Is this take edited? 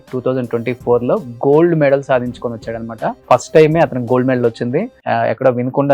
yes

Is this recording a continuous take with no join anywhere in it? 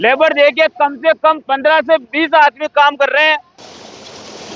no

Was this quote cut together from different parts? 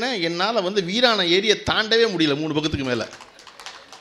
no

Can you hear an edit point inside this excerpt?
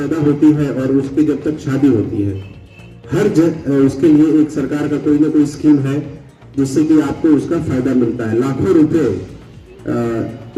no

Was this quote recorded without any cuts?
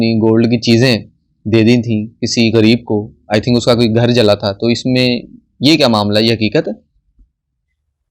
yes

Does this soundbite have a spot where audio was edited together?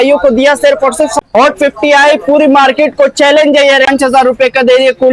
yes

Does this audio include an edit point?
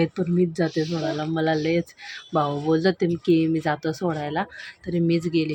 no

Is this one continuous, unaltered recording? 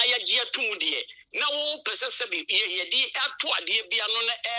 yes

